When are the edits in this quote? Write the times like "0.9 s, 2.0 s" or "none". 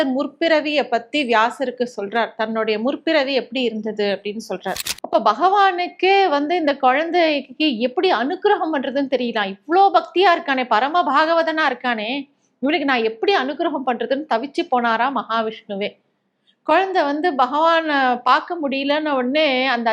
4.9 s